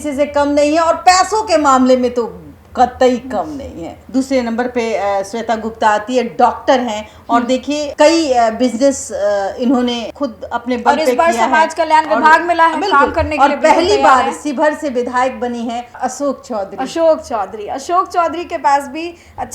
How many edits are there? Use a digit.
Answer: 3